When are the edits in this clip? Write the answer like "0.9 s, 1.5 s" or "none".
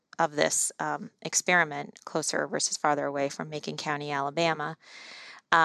none